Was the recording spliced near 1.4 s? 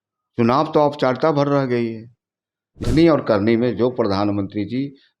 no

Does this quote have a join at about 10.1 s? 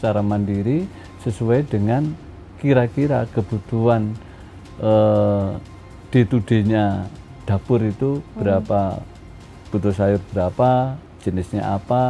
no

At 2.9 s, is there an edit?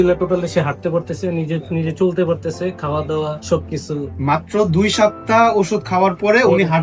no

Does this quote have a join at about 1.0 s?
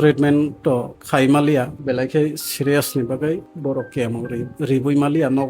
yes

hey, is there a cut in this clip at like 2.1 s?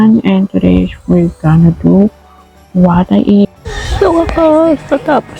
no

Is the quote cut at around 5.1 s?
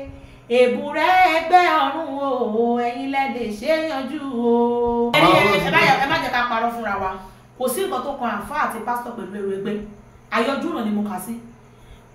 yes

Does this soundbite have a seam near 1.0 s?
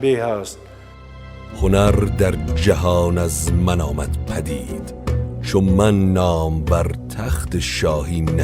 yes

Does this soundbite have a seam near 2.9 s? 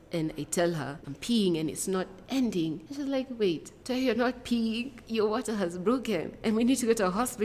yes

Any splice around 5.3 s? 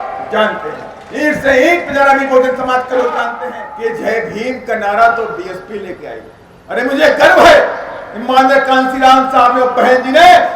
no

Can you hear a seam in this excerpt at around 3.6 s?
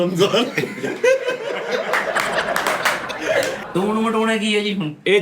yes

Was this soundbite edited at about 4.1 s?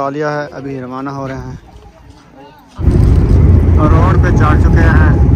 no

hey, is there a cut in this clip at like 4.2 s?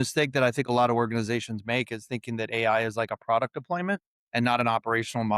yes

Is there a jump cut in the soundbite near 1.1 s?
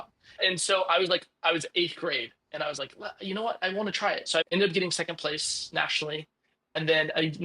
no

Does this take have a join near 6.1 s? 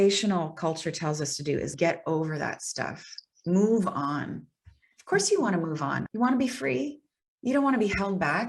yes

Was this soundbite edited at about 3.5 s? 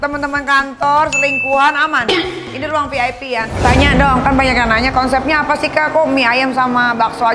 yes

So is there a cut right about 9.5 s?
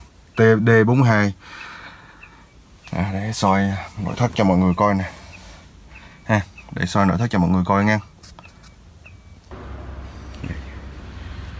yes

